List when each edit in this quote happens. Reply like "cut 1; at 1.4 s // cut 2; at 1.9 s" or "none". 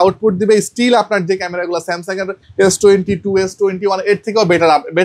none